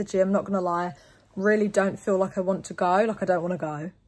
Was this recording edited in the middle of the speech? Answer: no; 0 cuts

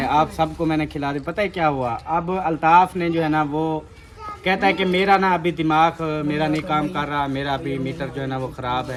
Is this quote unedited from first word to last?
yes; 0 cuts

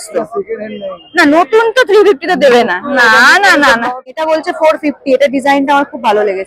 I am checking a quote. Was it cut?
yes; 1 cut; at 4.2 s

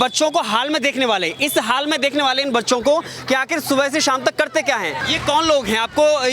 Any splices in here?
yes; 1 cut; at 5.1 s

